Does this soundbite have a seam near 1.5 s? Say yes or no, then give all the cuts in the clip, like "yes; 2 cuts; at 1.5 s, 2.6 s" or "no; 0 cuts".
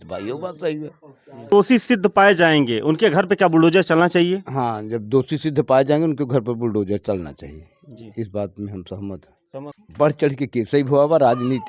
yes; 2 cuts; at 1.5 s, 9.8 s